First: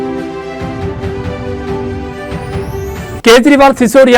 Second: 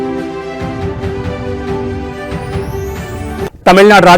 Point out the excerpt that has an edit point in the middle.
first; 1 cut; at 3.2 s

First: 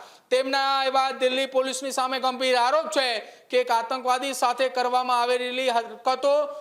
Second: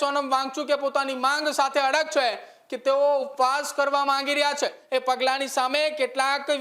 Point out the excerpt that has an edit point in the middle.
second; 1 cut; at 4.8 s

